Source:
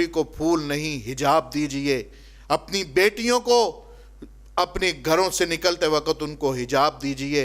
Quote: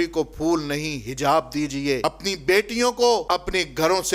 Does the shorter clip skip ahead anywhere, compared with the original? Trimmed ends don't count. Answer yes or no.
yes